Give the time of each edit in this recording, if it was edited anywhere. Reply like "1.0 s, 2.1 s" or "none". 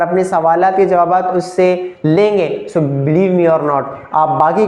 none